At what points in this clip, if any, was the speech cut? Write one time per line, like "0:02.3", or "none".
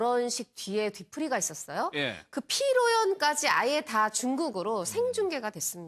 none